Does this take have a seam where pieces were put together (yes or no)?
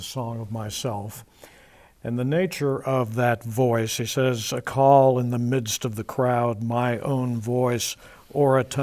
yes